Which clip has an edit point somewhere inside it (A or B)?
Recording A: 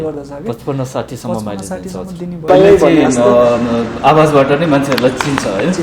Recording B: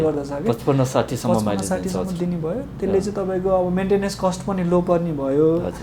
A